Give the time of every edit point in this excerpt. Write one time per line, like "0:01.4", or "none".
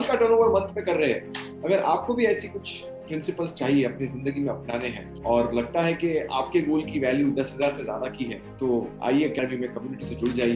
0:09.4

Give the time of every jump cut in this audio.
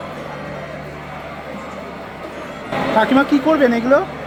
none

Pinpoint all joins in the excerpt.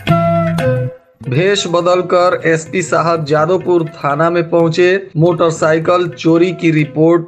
0:00.9

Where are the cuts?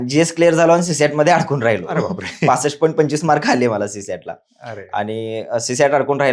none

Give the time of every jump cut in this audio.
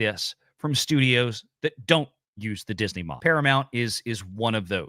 0:03.1

